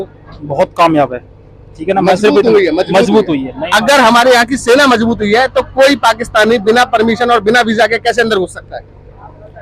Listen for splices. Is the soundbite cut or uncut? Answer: uncut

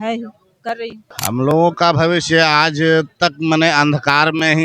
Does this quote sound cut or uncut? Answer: cut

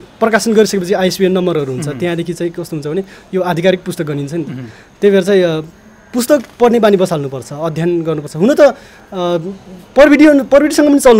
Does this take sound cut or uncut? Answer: uncut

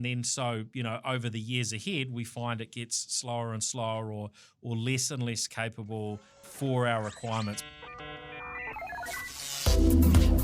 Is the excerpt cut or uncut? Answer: cut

